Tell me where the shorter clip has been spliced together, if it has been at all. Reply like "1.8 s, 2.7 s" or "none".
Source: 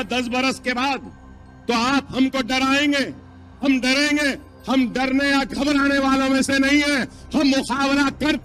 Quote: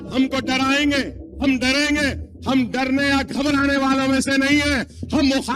1.2 s

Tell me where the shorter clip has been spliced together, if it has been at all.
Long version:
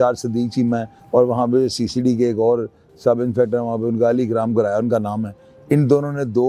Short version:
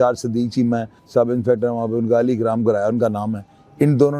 0.9 s

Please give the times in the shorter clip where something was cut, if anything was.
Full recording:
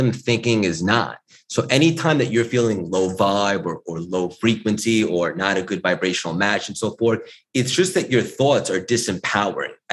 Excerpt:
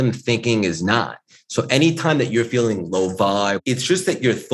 3.6 s

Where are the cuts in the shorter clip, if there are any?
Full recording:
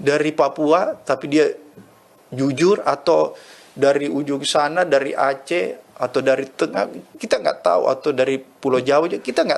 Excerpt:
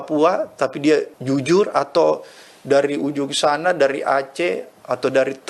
1.1 s

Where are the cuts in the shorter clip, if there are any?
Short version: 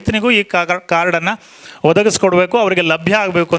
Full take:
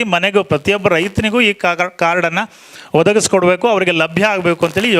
none

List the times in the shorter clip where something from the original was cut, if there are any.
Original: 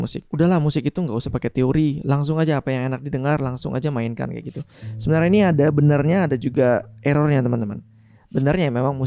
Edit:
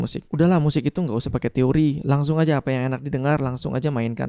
none

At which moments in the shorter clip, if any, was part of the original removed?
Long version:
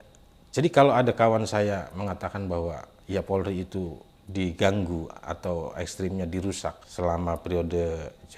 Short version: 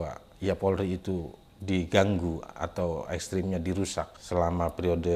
none

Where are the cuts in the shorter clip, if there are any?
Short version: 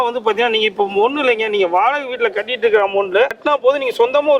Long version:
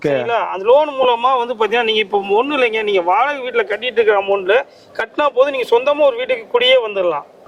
3.4 s

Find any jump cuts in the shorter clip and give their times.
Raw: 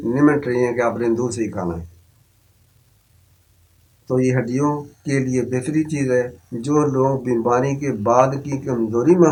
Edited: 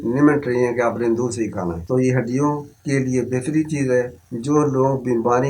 1.8 s

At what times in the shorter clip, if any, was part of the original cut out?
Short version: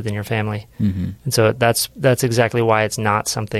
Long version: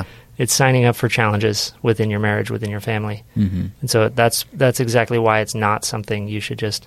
none

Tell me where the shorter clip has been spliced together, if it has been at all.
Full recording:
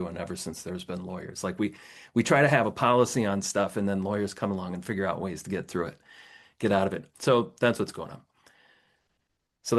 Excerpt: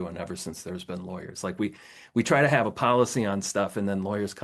none

